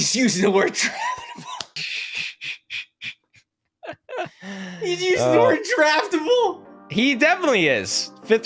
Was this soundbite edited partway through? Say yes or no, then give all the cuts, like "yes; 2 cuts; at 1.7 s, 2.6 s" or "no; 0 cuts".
no; 0 cuts